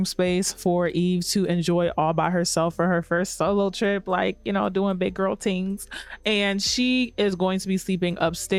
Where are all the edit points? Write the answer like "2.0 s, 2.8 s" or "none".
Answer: none